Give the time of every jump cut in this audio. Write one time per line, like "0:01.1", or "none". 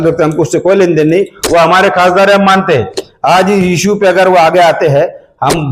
none